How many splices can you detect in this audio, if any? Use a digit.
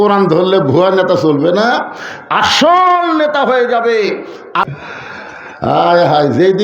1